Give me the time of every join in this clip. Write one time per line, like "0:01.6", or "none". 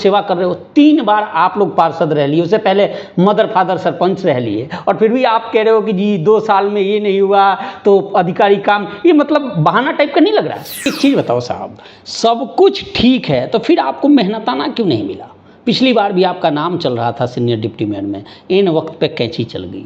0:10.9